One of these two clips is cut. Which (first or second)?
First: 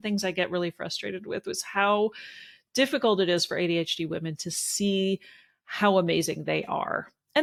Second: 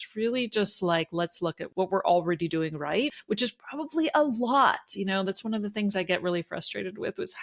second